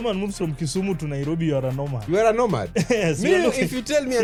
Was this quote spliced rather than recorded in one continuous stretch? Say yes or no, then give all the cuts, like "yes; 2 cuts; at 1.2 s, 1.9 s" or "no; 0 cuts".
no; 0 cuts